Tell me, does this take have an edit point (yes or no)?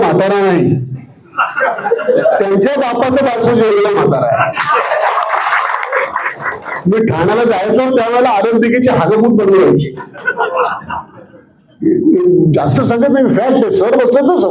no